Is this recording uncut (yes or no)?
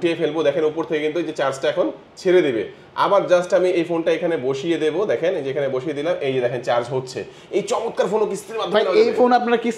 yes